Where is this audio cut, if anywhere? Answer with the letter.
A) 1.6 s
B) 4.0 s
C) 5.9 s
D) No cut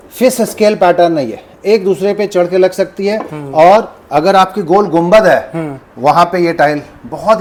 D